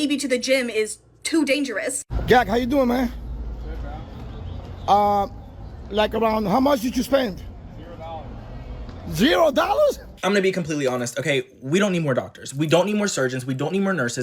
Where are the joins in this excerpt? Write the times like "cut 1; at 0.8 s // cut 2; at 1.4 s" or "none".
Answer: cut 1; at 2.1 s // cut 2; at 10.1 s